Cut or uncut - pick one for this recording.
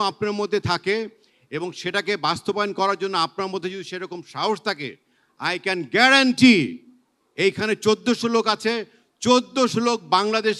uncut